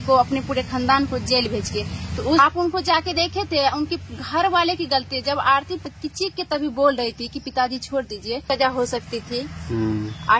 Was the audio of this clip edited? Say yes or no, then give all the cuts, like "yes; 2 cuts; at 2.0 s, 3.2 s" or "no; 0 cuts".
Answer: yes; 3 cuts; at 2.4 s, 5.9 s, 8.4 s